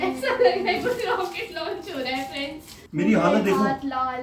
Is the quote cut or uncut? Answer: cut